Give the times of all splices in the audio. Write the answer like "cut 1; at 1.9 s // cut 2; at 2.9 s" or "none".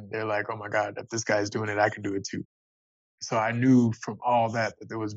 cut 1; at 2.6 s